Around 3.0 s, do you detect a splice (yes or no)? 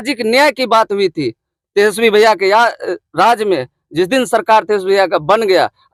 no